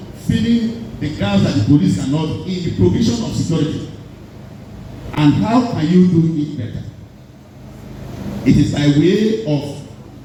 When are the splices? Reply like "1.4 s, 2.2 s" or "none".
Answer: none